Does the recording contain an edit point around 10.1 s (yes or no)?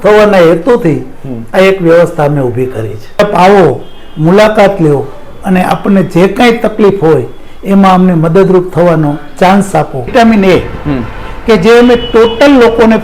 yes